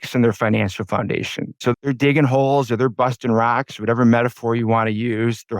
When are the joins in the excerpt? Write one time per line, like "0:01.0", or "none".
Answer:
0:01.6